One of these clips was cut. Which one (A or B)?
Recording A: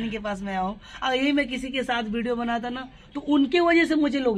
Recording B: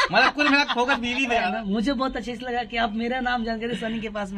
B